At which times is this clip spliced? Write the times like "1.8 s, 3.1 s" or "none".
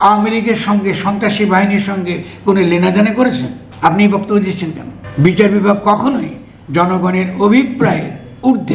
4.9 s